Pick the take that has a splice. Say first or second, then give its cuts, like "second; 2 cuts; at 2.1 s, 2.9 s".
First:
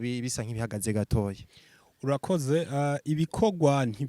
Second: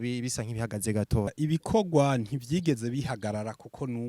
second; 1 cut; at 1.3 s